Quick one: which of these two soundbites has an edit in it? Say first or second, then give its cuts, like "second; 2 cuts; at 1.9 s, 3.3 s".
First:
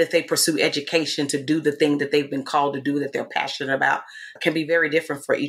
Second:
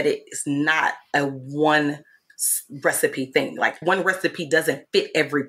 second; 1 cut; at 3.8 s